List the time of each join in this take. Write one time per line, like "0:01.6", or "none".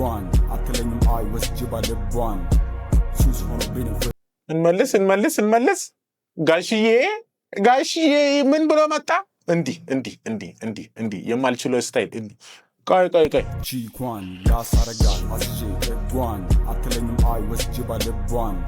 0:04.1